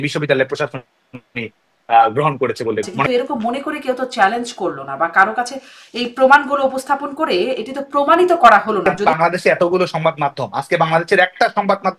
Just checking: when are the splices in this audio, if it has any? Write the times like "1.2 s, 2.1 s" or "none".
3.0 s, 8.9 s

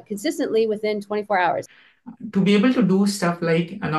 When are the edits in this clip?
1.7 s

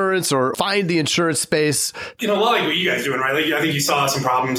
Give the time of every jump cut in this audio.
2.2 s

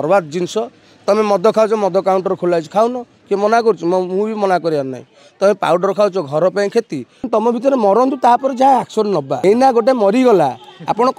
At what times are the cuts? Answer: 7.2 s, 9.3 s

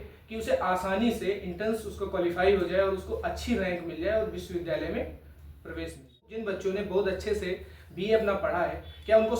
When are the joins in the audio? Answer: 6.4 s

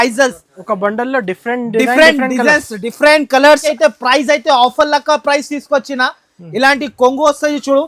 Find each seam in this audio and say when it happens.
3.7 s

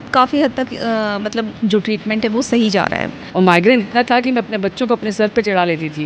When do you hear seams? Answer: 1.5 s, 3.2 s

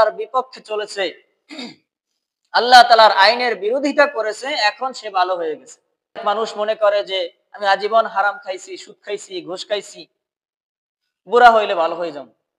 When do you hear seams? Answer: 6.2 s

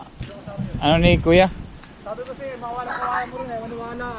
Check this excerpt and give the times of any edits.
none

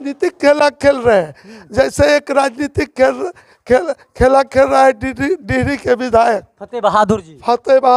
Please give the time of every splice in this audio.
none

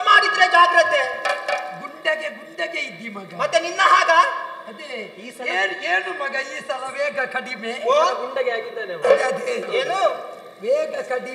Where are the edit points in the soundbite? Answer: none

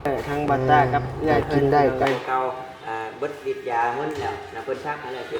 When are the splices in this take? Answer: 2.0 s

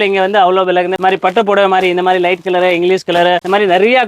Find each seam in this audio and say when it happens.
1.0 s

